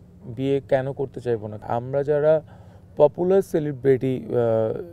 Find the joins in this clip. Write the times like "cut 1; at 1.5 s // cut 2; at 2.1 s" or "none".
cut 1; at 1.6 s

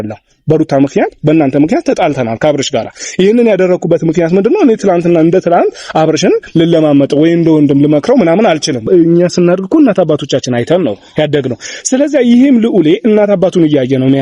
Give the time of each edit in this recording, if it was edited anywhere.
cut 1; at 8.8 s

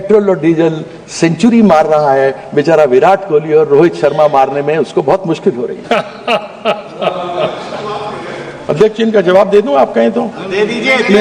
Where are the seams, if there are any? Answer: cut 1; at 5.8 s

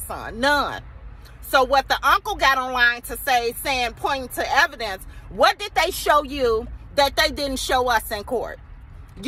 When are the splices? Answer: none

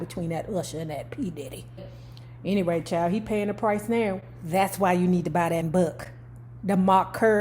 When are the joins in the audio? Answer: cut 1; at 2.0 s // cut 2; at 5.7 s

